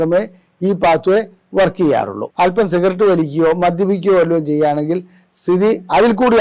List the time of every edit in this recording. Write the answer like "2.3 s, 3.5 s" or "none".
2.2 s